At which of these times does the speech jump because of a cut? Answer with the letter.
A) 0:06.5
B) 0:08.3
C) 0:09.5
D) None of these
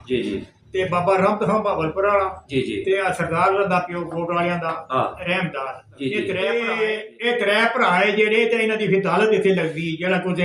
A